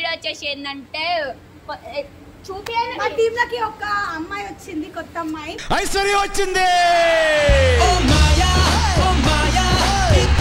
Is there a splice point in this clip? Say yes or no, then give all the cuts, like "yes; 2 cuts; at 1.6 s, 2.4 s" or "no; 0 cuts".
no; 0 cuts